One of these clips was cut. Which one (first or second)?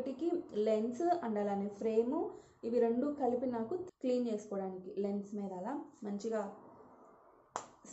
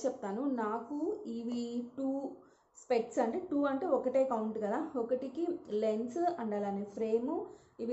first